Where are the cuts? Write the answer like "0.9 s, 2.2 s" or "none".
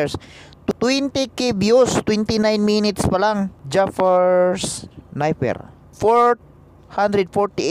0.7 s, 3.6 s, 5.9 s

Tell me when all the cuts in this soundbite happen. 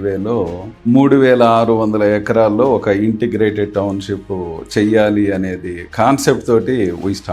none

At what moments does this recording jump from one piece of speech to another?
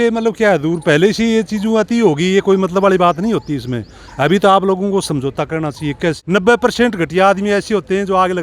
6.2 s

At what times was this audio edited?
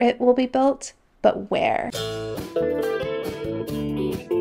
2.0 s

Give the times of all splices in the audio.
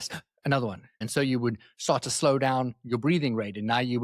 1.0 s

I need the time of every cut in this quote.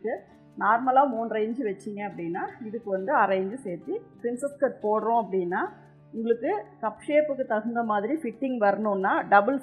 4.1 s

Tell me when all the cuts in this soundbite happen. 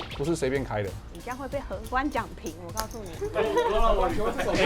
1.0 s

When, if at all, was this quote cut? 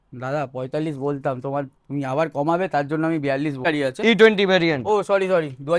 3.6 s

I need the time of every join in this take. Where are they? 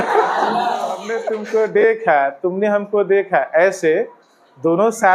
1.2 s

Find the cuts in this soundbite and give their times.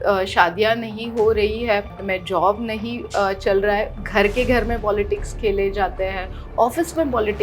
1.9 s

